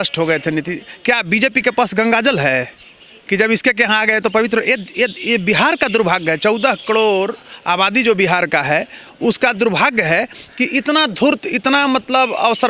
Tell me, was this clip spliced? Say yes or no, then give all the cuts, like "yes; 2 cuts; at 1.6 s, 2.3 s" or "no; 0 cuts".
no; 0 cuts